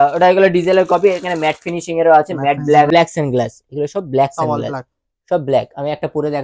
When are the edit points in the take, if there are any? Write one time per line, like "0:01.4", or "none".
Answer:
0:02.9